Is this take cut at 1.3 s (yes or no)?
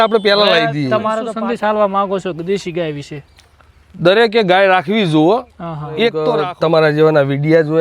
yes